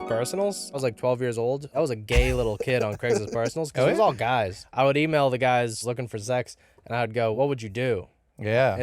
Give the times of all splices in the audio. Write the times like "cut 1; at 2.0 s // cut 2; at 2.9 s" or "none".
cut 1; at 0.8 s // cut 2; at 1.7 s // cut 3; at 4.6 s // cut 4; at 5.8 s // cut 5; at 7.3 s